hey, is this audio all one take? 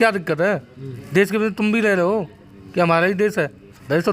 yes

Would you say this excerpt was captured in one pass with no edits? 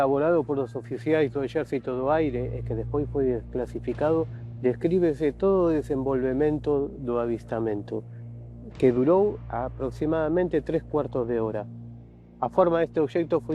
yes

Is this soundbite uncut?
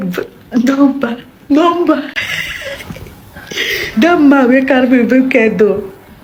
yes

